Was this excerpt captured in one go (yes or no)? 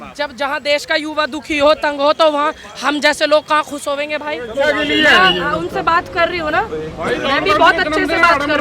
no